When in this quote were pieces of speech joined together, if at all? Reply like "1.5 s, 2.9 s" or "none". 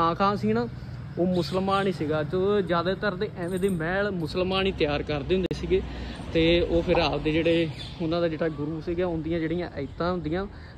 none